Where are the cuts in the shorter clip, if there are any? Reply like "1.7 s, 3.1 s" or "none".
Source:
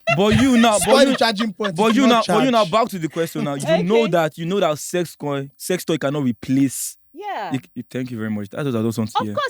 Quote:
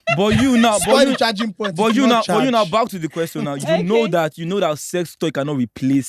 5.1 s